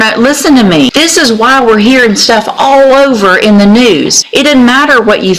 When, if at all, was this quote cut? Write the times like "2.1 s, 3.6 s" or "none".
0.9 s, 4.2 s